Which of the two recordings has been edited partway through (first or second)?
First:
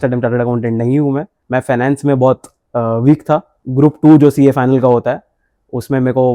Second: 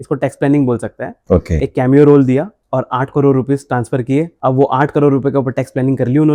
first